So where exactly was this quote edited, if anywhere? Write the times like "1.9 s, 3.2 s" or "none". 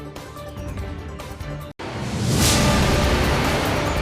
1.7 s